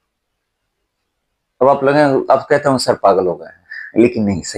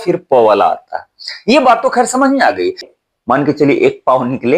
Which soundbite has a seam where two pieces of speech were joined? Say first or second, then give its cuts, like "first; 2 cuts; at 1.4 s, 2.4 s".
second; 1 cut; at 2.9 s